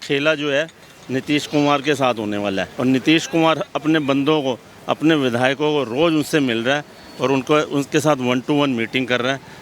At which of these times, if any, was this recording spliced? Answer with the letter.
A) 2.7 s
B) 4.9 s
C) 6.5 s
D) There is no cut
A